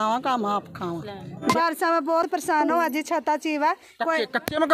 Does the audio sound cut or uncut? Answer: cut